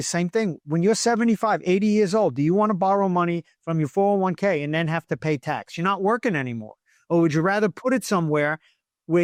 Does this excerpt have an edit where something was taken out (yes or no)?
no